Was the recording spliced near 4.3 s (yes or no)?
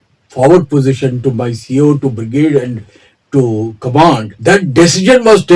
yes